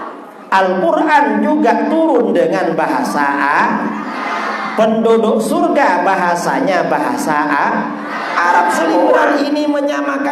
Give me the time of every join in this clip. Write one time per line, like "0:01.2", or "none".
0:09.3